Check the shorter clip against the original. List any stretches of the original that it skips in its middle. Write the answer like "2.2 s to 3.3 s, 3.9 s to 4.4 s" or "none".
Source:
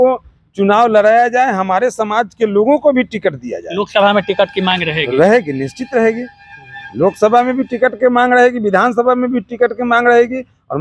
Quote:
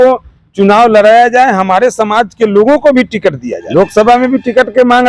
3.5 s to 6.8 s